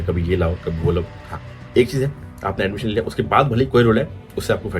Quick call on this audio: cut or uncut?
cut